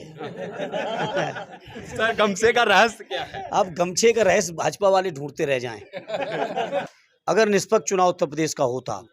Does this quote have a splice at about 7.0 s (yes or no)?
yes